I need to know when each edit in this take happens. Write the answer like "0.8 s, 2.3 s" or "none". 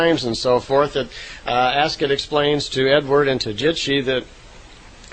1.6 s